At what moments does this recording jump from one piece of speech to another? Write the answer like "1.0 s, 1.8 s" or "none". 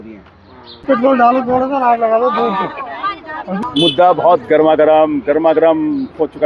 0.8 s, 3.5 s

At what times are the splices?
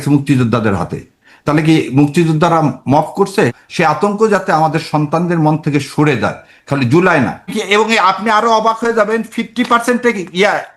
3.6 s, 7.4 s

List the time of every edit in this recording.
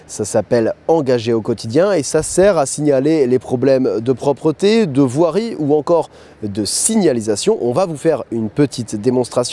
1.1 s

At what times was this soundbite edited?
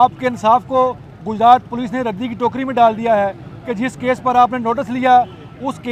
none

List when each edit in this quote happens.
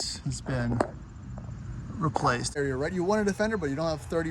2.5 s

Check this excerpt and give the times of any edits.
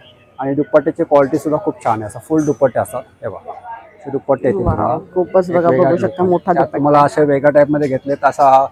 none

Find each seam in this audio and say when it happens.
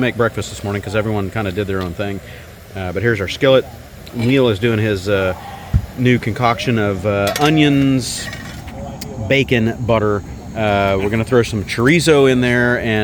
none

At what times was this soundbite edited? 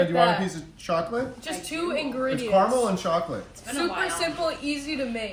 none

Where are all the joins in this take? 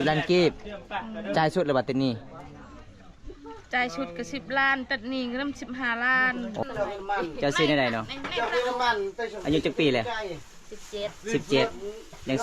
6.6 s

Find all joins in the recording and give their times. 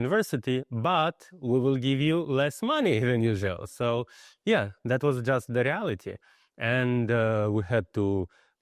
none

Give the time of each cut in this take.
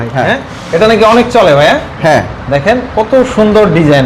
none

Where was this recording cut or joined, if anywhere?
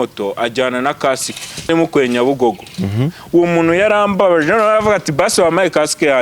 1.7 s

